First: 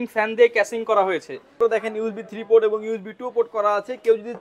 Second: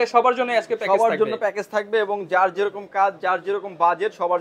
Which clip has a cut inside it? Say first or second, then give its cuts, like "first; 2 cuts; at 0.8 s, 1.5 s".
first; 1 cut; at 1.6 s